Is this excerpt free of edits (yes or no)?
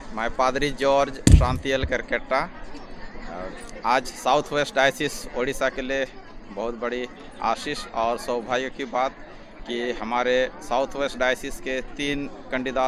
yes